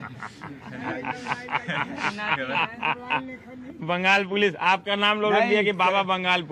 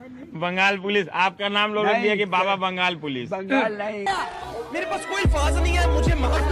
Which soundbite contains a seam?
second; 1 cut; at 4.1 s

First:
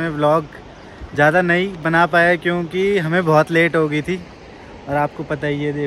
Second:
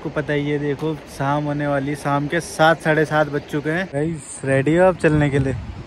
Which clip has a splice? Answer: second; 1 cut; at 3.9 s

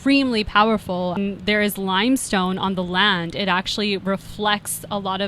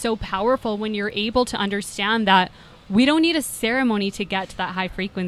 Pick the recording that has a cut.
first; 1 cut; at 1.2 s

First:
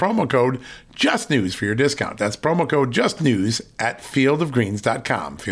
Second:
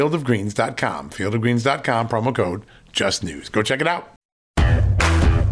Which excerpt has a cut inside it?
second; 1 cut; at 4.5 s

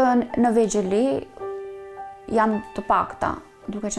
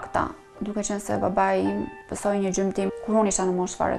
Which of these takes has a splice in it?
second; 2 cuts; at 2.0 s, 2.9 s

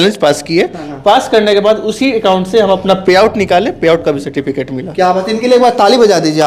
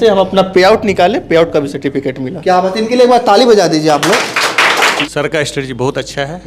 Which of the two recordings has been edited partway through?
second; 1 cut; at 4.9 s

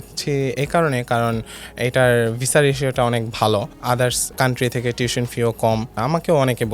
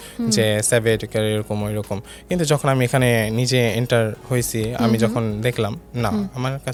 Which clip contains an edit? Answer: first; 2 cuts; at 3.7 s, 5.9 s

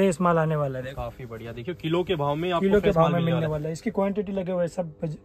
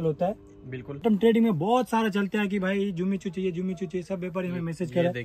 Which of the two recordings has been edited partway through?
second; 1 cut; at 1.0 s

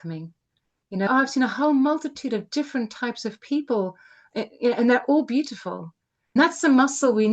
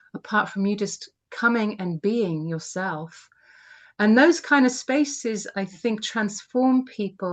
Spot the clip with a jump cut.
first; 2 cuts; at 1.1 s, 6.4 s

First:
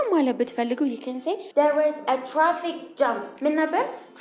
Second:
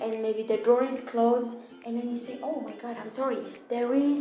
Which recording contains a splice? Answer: first; 1 cut; at 1.4 s

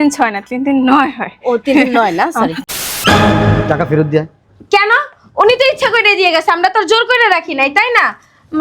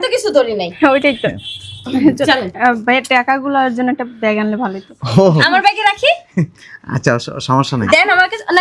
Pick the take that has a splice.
first; 1 cut; at 2.7 s

